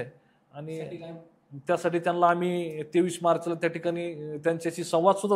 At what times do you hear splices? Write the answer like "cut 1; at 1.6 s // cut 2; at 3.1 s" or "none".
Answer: none